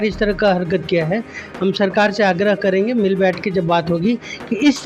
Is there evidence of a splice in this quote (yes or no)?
no